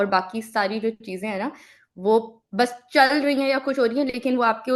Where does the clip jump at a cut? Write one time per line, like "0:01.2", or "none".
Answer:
none